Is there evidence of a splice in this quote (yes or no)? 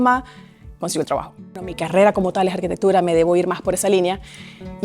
yes